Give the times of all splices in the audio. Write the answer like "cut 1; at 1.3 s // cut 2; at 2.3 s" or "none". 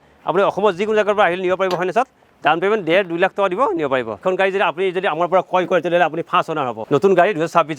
cut 1; at 4.2 s // cut 2; at 6.8 s